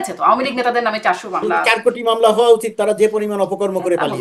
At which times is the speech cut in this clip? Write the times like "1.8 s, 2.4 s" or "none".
1.6 s